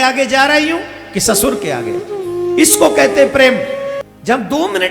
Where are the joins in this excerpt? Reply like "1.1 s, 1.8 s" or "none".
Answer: 4.0 s